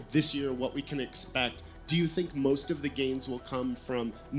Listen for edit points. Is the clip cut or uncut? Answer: uncut